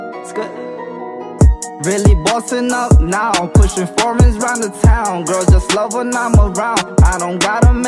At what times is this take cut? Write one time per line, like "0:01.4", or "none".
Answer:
none